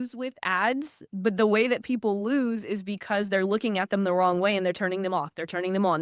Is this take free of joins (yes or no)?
yes